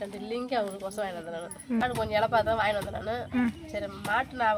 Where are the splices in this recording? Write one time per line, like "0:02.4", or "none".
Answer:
0:01.8